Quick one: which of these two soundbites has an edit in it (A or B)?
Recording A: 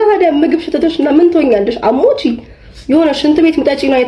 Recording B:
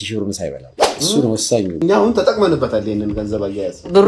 B